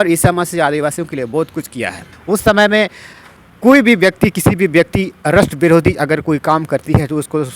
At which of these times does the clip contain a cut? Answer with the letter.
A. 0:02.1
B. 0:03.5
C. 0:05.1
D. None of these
A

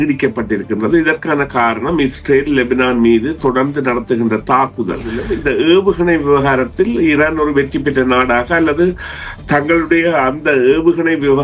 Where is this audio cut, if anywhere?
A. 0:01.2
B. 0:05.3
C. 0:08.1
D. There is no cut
B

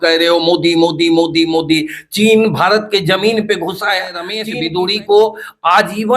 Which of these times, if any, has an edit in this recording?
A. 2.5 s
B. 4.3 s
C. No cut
B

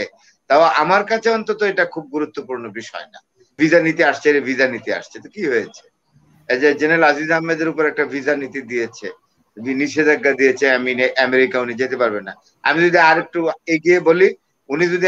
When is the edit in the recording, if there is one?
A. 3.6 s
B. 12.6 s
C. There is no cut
A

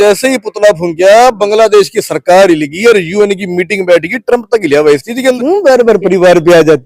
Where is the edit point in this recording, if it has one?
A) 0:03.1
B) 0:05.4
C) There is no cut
B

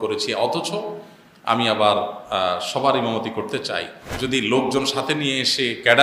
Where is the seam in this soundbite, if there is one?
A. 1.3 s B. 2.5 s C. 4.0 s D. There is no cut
C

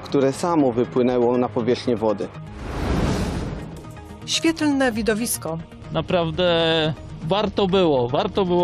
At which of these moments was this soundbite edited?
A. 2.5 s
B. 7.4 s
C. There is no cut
A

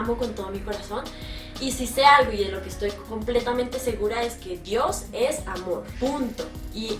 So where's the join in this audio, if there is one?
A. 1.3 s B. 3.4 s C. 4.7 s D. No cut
B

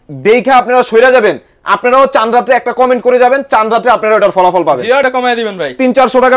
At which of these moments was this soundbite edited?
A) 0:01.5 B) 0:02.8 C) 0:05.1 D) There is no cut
C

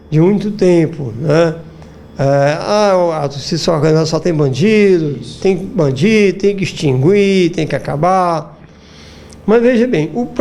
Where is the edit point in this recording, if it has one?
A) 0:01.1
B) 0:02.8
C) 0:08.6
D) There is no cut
D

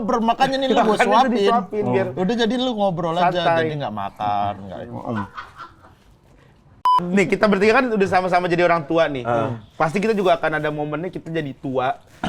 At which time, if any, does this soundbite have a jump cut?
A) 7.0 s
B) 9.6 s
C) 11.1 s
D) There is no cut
A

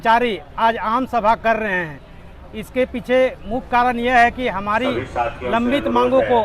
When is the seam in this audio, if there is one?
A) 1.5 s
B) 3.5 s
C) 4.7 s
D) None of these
D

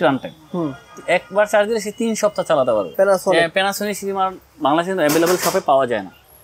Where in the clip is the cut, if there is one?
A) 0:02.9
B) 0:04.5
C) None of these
A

